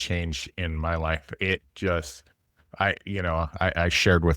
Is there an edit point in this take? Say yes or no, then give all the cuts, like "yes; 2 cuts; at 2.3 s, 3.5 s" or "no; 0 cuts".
no; 0 cuts